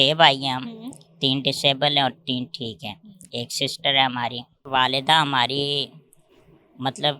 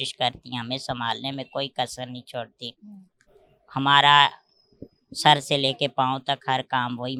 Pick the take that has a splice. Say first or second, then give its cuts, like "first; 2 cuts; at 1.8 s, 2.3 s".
first; 1 cut; at 4.5 s